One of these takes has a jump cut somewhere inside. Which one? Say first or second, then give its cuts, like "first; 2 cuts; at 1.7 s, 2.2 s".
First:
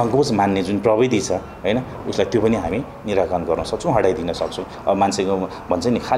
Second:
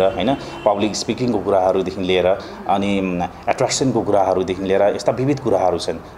first; 1 cut; at 4.7 s